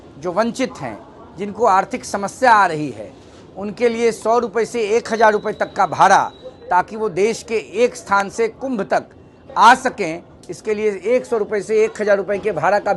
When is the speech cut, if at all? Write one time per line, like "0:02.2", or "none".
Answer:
none